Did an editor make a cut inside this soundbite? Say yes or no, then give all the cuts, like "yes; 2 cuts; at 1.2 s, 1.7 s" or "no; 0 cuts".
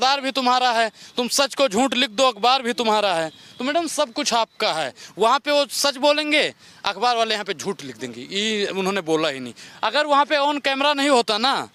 no; 0 cuts